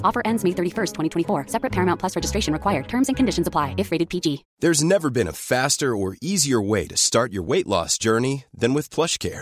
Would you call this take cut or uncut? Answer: cut